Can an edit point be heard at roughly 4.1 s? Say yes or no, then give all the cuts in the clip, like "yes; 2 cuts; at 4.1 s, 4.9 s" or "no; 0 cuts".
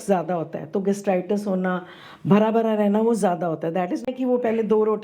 yes; 1 cut; at 4.1 s